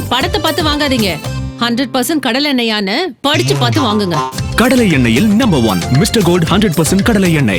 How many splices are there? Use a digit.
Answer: 0